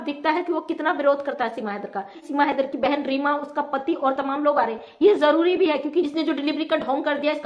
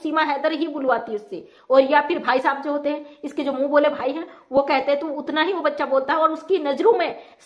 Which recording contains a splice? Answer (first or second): first